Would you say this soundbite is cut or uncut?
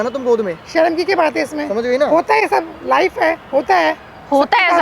uncut